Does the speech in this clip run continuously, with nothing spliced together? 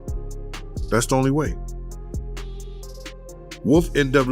no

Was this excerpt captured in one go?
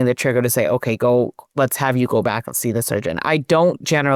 yes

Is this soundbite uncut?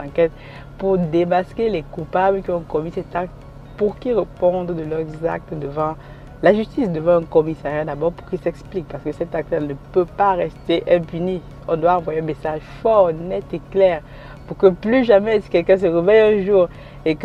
yes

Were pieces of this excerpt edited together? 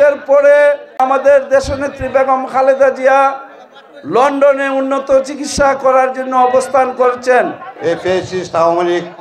yes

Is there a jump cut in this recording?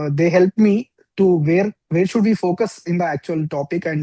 no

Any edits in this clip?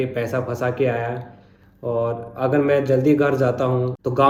no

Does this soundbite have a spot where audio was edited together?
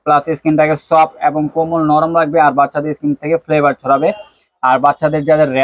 no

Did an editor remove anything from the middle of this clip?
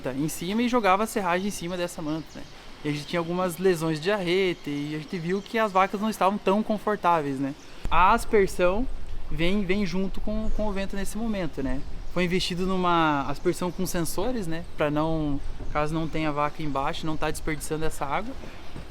yes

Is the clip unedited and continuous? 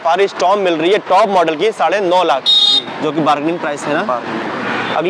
yes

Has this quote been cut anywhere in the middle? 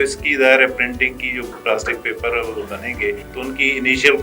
yes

